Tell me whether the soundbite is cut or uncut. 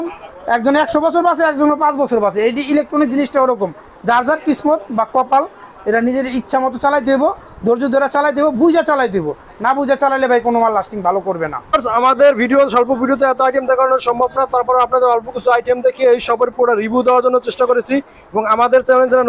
uncut